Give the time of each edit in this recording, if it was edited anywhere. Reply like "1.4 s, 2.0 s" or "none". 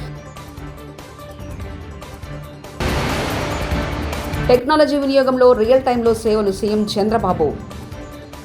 2.8 s, 4.4 s